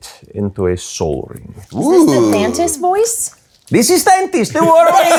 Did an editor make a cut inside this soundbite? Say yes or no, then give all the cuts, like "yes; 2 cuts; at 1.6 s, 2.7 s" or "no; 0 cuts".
no; 0 cuts